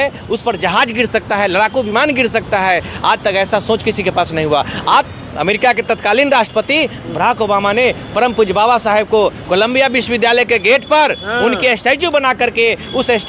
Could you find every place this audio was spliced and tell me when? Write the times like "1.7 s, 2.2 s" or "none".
5.1 s